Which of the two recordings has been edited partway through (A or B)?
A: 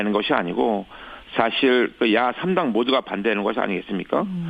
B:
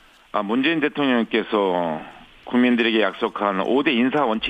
B